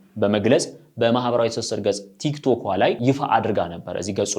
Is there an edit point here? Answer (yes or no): yes